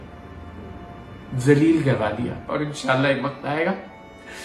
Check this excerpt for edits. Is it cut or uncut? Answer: cut